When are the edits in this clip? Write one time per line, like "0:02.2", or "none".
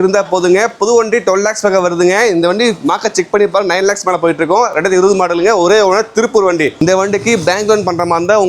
0:06.8